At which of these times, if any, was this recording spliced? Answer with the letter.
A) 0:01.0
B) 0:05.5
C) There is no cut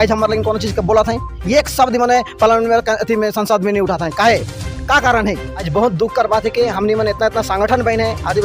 B